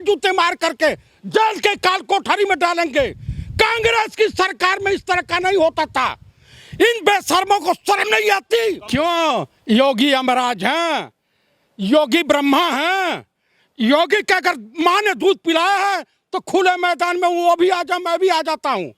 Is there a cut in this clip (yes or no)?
yes